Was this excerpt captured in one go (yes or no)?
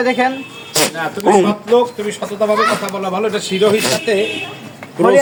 yes